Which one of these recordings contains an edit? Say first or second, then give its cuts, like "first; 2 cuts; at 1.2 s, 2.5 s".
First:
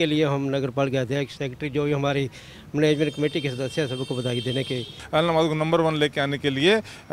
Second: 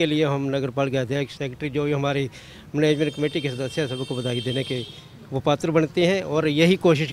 first; 1 cut; at 5.0 s